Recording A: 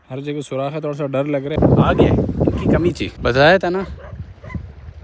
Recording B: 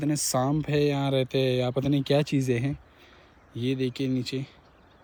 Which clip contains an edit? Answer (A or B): A